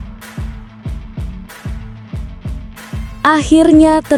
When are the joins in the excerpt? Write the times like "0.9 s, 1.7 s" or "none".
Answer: none